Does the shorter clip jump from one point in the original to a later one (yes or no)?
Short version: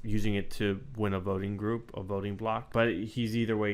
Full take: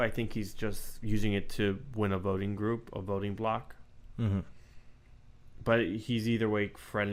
yes